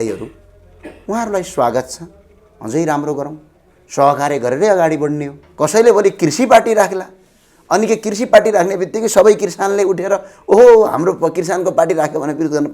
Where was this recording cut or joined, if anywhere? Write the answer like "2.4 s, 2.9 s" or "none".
5.4 s

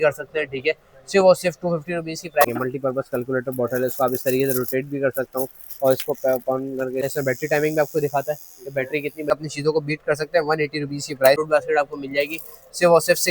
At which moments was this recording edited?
2.4 s, 7.0 s, 9.3 s, 11.4 s

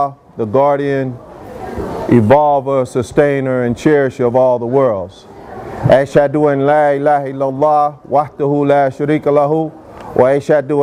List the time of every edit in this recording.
none

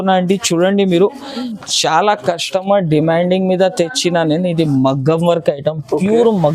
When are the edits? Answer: 1.5 s

